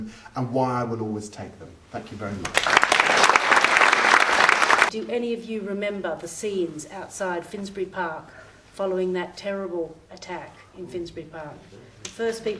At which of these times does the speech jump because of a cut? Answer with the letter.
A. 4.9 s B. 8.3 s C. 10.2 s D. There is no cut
A